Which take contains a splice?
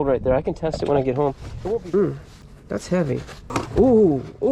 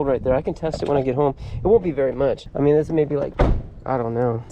first; 2 cuts; at 1.5 s, 3.4 s

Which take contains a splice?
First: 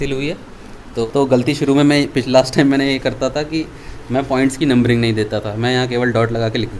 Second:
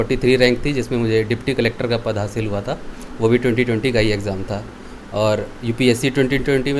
first; 1 cut; at 1.0 s

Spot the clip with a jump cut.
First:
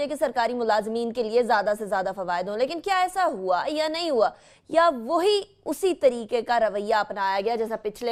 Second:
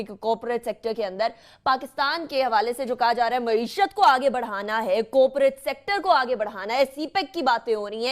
second; 1 cut; at 6.3 s

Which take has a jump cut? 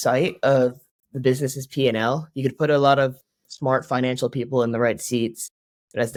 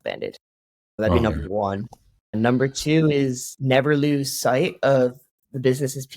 second; 1 cut; at 3.5 s

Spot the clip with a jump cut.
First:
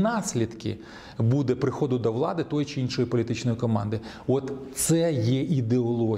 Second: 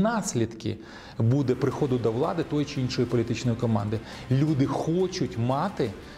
second; 1 cut; at 4.1 s

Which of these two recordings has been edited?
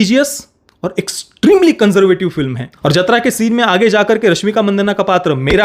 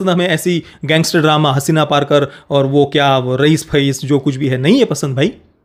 first; 1 cut; at 2.6 s

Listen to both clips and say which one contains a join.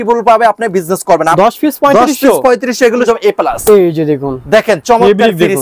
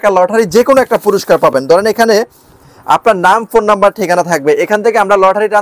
first; 2 cuts; at 1.3 s, 3.0 s

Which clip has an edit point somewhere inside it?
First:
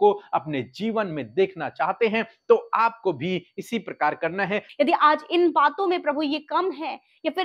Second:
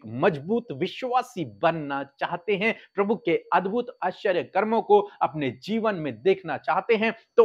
first; 1 cut; at 4.7 s

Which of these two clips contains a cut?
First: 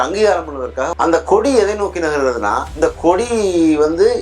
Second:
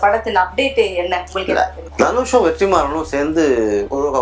first; 1 cut; at 0.9 s

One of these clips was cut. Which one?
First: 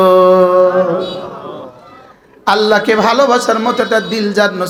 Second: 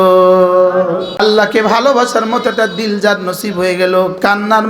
second; 1 cut; at 1.2 s

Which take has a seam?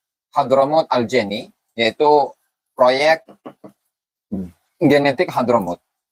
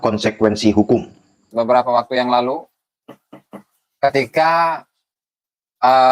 second; 1 cut; at 1.4 s

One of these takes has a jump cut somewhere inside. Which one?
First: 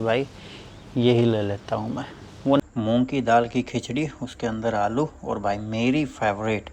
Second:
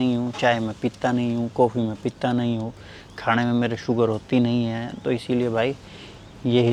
first; 1 cut; at 2.7 s

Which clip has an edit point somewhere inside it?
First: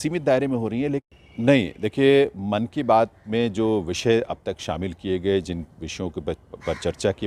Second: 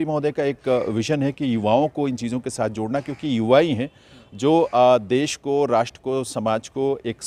first; 1 cut; at 1.2 s

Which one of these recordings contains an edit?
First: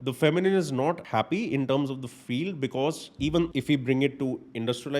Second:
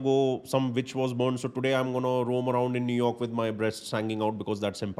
first; 2 cuts; at 1.0 s, 3.5 s

